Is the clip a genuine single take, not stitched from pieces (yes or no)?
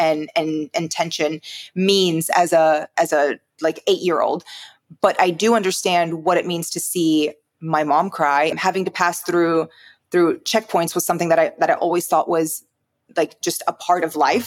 no